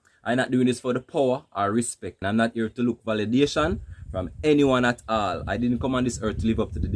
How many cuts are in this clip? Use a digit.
1